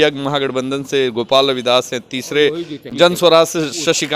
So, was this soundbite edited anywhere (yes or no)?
yes